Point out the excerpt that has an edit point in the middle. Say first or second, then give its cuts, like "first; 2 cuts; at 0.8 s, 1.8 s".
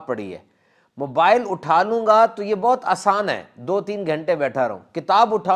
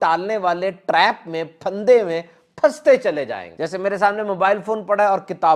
second; 1 cut; at 3.4 s